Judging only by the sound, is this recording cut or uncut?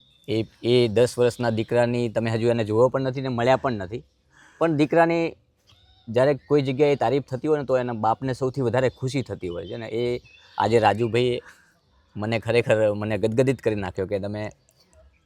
uncut